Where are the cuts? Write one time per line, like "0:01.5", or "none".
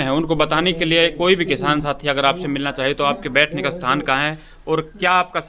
none